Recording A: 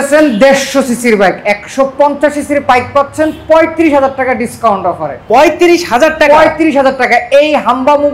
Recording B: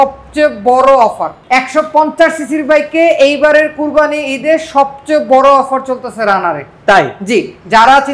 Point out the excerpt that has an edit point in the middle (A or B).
B